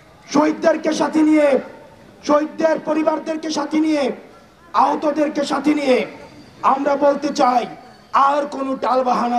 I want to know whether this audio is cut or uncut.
uncut